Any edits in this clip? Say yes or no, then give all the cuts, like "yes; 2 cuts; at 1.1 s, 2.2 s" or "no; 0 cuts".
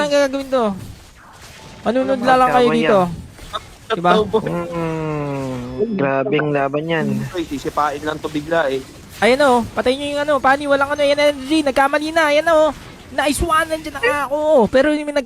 yes; 1 cut; at 7.3 s